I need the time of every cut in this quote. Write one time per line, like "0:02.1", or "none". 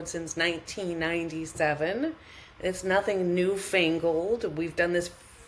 none